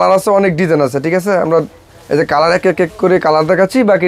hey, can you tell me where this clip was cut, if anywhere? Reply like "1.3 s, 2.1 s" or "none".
none